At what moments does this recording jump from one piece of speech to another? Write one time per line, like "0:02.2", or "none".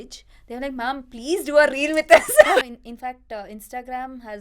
0:02.6